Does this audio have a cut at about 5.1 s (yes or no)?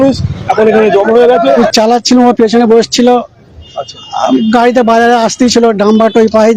no